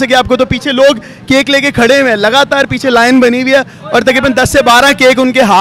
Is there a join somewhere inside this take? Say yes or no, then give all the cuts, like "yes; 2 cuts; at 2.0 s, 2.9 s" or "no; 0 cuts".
no; 0 cuts